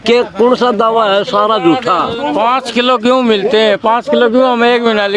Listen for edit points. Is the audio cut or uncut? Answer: cut